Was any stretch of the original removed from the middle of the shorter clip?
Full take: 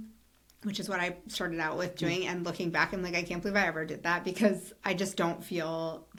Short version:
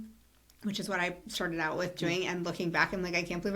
no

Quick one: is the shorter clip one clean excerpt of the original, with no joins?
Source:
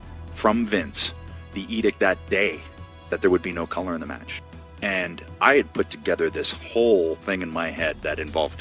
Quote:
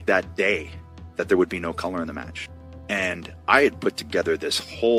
yes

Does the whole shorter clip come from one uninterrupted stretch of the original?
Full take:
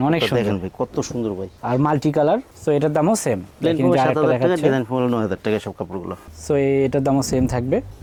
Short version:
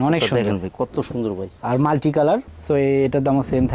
no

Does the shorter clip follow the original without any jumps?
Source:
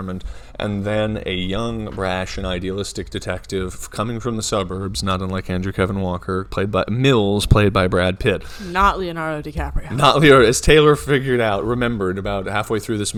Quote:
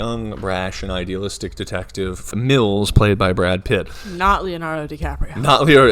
no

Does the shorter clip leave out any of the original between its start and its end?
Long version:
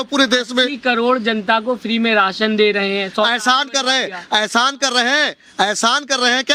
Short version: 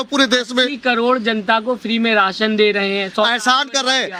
no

